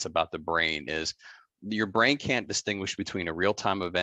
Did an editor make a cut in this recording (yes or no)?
no